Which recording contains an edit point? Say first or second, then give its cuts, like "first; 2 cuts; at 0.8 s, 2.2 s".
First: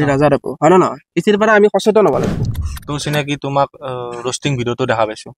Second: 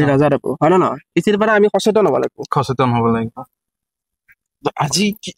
first; 1 cut; at 2.4 s